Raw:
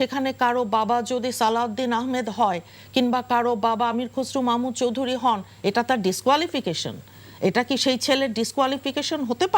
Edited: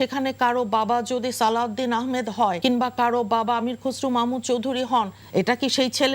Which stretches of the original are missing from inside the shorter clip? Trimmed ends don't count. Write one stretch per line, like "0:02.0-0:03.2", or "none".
0:02.6-0:02.9
0:05.5-0:07.2